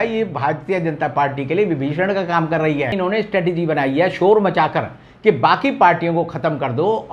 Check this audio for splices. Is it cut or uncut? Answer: cut